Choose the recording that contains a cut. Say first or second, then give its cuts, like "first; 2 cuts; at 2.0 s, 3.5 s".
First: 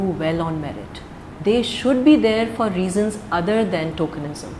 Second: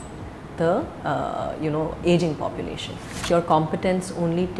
second; 1 cut; at 3.2 s